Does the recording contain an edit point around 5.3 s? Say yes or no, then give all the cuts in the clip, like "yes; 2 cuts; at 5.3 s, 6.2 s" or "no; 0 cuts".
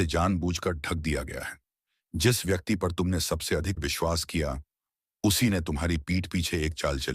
no; 1 cut; at 3.8 s